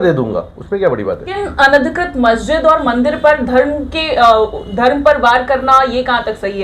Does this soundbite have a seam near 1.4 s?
yes; 1 cut; at 1.4 s

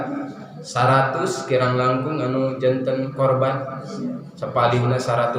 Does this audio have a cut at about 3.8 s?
no; 0 cuts

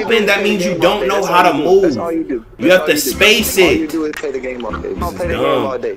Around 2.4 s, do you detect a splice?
no; 1 cut; at 5.0 s

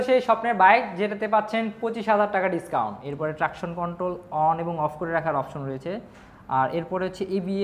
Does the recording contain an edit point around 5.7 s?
no; 1 cut; at 3.0 s

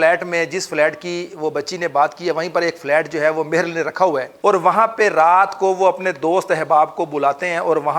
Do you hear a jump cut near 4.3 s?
yes; 1 cut; at 4.3 s

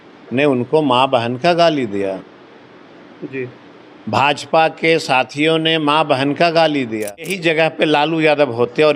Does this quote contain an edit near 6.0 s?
no; 1 cut; at 7.3 s

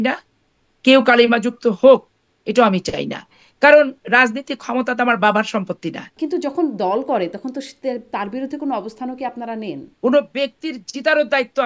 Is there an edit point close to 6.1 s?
yes; 2 cuts; at 6.1 s, 9.8 s

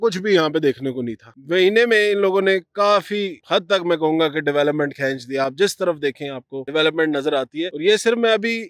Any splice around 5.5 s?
no; 0 cuts

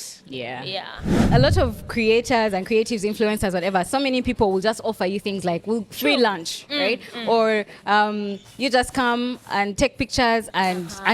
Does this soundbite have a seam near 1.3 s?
yes; 1 cut; at 1.3 s

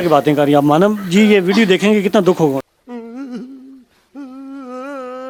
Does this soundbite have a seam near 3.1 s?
no; 0 cuts

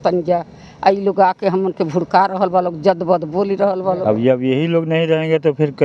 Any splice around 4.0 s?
yes; 1 cut; at 4.0 s

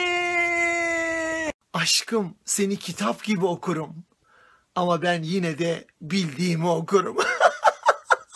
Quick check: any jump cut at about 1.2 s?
no; 1 cut; at 4.5 s

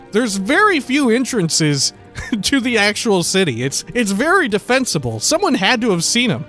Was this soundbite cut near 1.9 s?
no; 1 cut; at 3.8 s

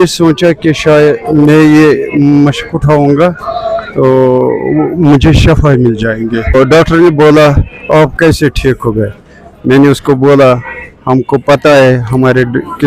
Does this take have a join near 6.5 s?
yes; 1 cut; at 6.5 s

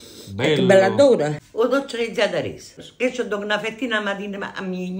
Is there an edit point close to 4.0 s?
no; 2 cuts; at 1.4 s, 2.8 s

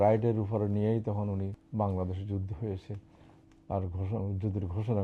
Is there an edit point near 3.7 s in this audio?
no; 1 cut; at 1.6 s

